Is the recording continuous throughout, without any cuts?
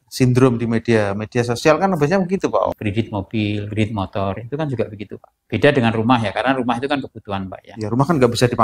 no; 1 cut; at 2.7 s

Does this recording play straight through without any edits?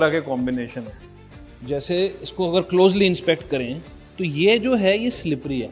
yes; 0 cuts

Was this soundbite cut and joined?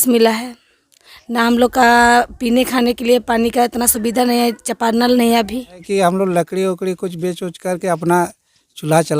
yes; 1 cut; at 5.8 s

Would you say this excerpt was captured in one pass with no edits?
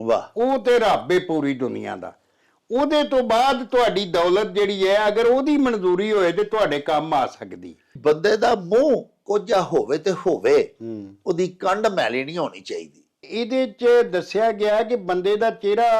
no; 2 cuts; at 7.9 s, 13.3 s

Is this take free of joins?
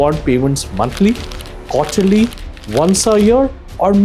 yes; 0 cuts

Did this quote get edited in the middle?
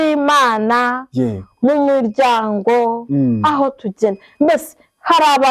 no; 0 cuts

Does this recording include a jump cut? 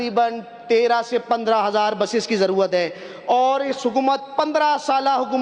no; 0 cuts

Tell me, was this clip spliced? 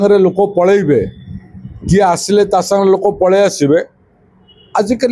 no; 0 cuts

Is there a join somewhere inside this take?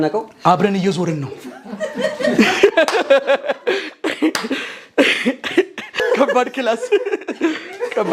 yes; 1 cut; at 6.0 s

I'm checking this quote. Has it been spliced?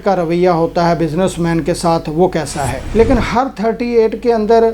yes; 1 cut; at 2.8 s

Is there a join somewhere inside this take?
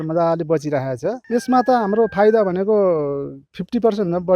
yes; 1 cut; at 1.2 s

